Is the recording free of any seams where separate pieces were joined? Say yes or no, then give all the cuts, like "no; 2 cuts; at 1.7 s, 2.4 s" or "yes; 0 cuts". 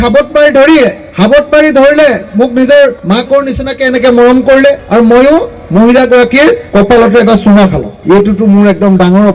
no; 5 cuts; at 1.0 s, 3.0 s, 4.8 s, 6.6 s, 7.9 s